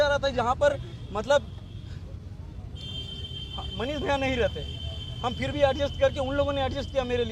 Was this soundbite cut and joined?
no; 0 cuts

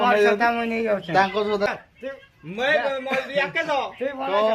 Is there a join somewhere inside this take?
yes; 1 cut; at 1.7 s

